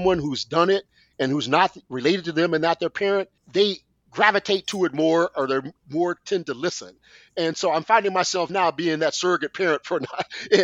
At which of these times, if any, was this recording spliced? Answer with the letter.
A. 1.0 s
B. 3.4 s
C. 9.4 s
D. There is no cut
B